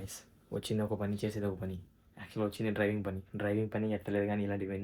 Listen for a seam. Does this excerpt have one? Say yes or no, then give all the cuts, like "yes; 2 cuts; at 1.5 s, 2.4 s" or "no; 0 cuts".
no; 0 cuts